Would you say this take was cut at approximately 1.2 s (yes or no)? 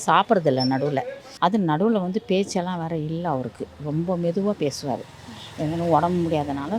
yes